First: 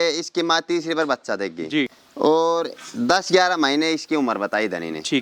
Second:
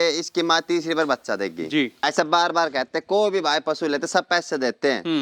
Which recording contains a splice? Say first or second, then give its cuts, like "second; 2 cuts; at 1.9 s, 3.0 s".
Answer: second; 1 cut; at 2.0 s